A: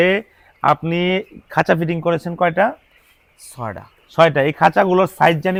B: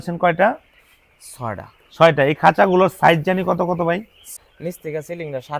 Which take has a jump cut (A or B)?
B